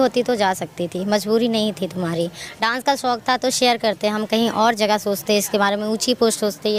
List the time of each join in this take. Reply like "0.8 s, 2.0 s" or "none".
none

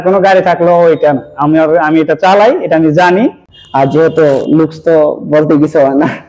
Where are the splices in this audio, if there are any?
3.5 s

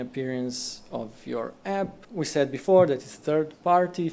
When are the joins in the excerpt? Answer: 2.0 s

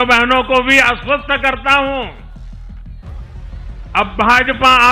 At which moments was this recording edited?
2.2 s, 3.9 s

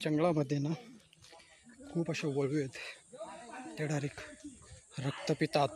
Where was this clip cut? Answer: none

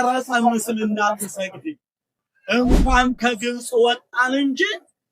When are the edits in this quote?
2.3 s

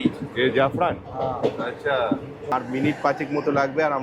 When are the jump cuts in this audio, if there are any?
2.5 s

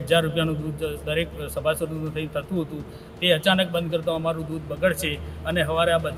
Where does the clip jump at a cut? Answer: none

